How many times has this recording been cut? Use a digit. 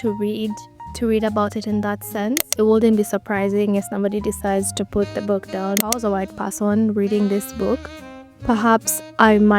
2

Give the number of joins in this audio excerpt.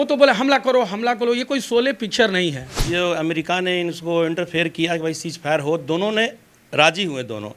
1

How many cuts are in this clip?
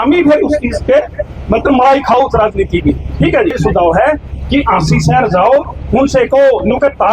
1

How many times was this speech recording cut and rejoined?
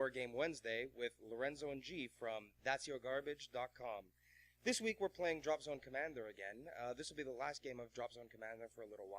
1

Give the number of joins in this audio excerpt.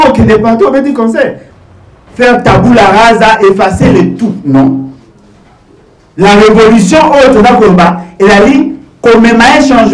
1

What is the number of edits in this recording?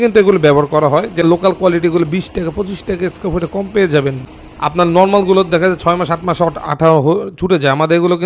2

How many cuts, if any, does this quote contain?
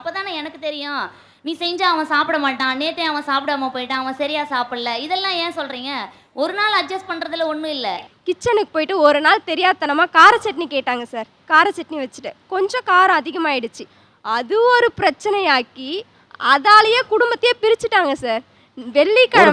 1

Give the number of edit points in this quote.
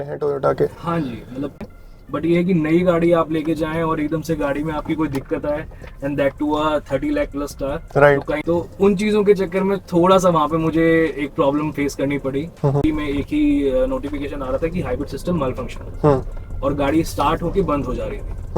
3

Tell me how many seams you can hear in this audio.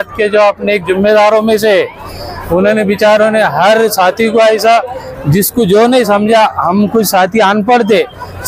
0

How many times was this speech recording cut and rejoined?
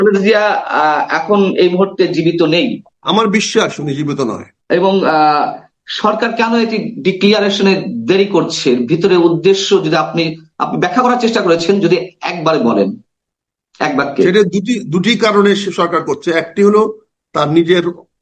2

